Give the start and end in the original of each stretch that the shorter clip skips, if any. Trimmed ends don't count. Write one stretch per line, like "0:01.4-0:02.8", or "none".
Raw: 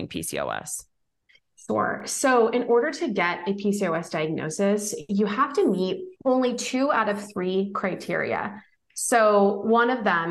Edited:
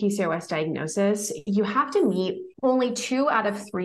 none